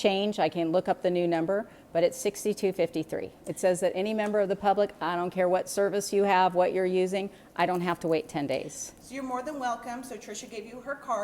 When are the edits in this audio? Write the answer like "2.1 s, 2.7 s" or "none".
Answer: 4.5 s

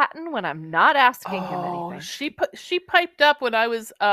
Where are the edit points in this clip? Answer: 1.3 s

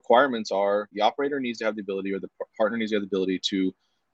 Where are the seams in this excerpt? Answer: 0.9 s

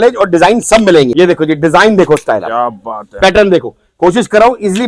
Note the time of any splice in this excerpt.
1.1 s

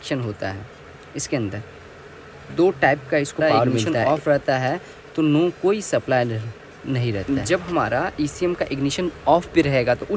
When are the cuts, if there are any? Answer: 3.9 s, 7.2 s

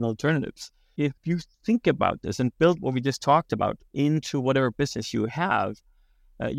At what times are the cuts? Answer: 1.2 s, 3.8 s

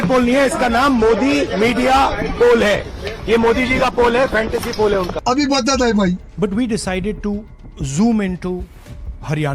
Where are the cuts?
none

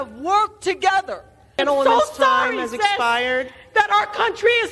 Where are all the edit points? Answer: 1.6 s

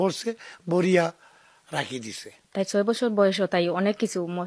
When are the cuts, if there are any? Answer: 2.4 s

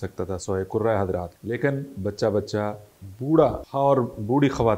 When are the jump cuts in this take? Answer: 1.3 s, 3.6 s

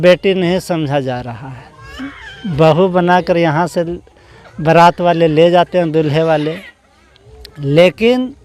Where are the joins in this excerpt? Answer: none

